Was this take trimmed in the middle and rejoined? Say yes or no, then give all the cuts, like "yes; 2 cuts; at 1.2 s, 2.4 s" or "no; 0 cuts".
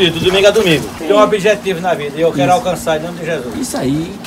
yes; 1 cut; at 0.9 s